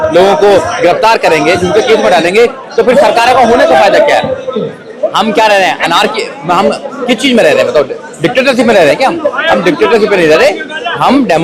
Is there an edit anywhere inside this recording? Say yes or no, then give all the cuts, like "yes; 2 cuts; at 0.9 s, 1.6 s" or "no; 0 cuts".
no; 0 cuts